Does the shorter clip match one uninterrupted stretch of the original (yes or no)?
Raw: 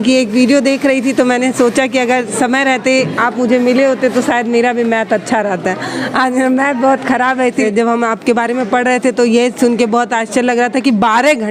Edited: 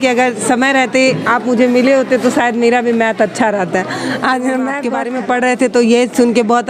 no